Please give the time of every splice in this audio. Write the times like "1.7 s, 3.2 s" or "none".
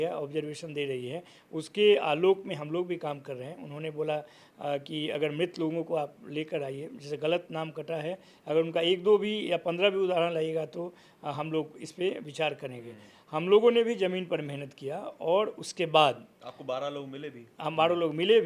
none